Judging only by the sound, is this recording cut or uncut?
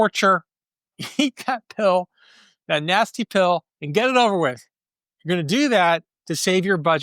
uncut